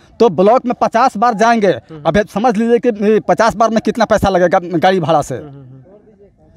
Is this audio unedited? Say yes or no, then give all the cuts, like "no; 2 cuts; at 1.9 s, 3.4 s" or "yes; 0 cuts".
yes; 0 cuts